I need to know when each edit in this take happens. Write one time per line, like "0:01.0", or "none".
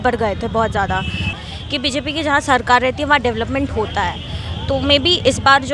0:01.3